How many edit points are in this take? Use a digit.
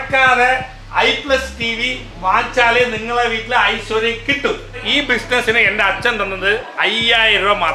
1